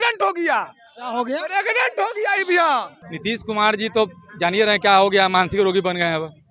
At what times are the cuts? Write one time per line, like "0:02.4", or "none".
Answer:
0:03.0